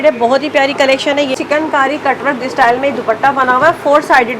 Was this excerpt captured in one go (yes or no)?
no